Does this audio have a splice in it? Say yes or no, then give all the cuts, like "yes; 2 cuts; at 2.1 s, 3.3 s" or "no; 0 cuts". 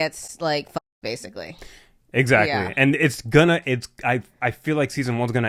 no; 0 cuts